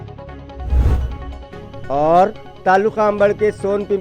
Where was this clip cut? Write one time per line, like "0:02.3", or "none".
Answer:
0:01.2